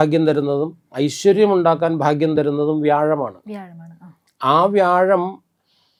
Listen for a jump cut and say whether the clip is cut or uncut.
uncut